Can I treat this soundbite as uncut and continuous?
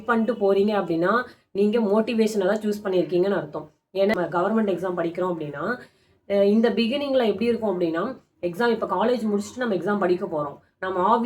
no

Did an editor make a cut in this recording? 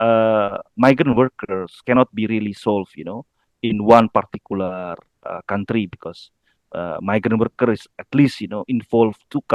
no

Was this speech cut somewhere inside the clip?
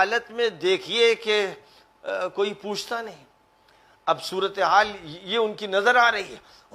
no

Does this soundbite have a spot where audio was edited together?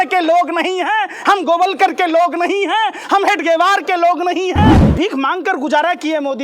yes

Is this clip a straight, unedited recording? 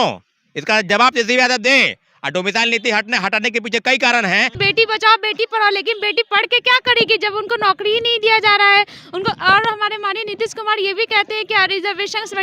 no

